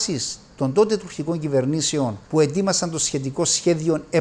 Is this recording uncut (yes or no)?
yes